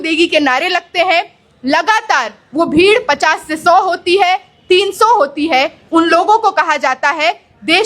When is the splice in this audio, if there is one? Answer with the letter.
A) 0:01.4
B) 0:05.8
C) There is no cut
B